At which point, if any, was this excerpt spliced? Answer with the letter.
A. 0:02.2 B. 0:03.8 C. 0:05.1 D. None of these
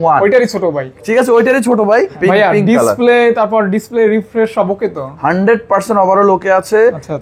A